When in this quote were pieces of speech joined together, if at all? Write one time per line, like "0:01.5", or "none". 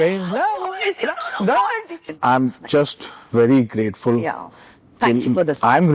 0:02.0